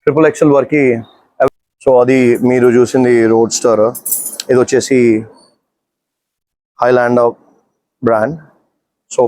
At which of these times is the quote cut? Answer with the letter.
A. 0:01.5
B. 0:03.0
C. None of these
A